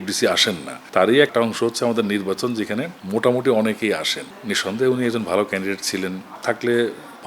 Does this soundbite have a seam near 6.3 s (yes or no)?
yes